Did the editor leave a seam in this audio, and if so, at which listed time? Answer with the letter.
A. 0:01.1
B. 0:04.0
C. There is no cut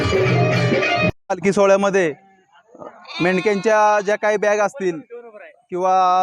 A